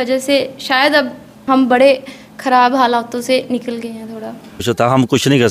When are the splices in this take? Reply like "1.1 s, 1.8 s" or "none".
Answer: 1.3 s, 4.6 s